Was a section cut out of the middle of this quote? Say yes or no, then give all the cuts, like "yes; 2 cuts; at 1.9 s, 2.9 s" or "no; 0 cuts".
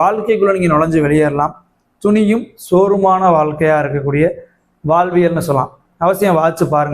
no; 0 cuts